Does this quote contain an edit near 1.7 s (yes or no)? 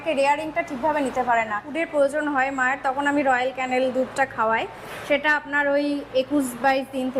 yes